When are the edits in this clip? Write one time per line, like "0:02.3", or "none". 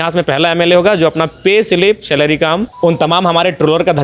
0:02.7